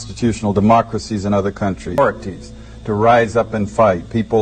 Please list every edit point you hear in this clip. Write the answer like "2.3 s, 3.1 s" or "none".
2.0 s